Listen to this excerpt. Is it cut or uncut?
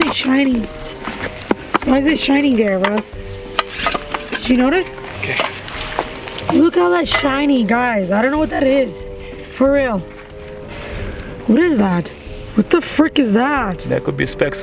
uncut